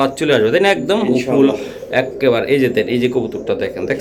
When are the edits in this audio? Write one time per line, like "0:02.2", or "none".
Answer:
none